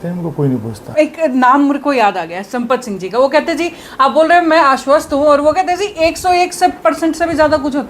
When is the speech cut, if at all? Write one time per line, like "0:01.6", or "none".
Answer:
0:00.9